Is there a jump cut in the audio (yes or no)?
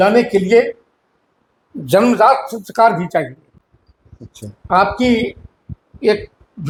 no